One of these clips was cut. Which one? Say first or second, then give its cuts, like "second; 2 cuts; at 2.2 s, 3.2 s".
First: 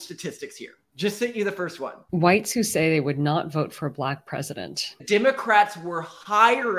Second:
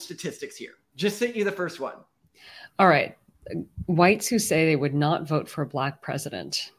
first; 2 cuts; at 2.0 s, 5.0 s